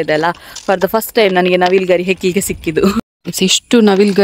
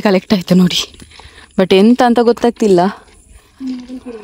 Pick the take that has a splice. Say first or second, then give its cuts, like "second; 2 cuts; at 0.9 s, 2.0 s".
first; 1 cut; at 3.0 s